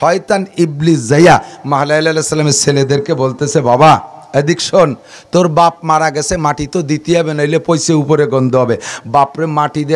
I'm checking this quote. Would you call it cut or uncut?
uncut